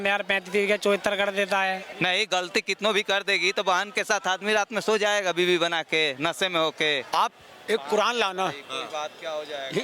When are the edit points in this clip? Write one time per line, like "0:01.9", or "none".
0:01.9
0:07.0